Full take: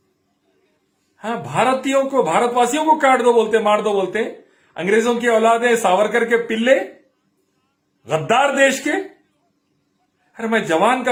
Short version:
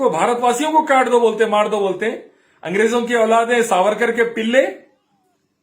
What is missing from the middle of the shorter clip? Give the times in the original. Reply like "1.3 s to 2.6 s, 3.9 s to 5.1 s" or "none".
none